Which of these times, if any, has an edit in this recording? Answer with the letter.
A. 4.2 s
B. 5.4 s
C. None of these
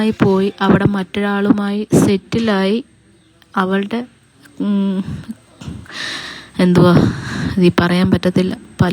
C